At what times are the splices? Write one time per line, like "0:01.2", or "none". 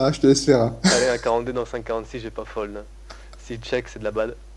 0:00.9